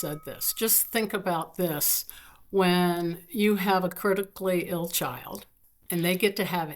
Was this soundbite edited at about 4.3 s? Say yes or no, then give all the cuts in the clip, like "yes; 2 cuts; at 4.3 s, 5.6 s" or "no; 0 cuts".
no; 1 cut; at 5.7 s